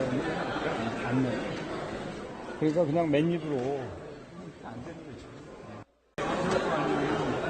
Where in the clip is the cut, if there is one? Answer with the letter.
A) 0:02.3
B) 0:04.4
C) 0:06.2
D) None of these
C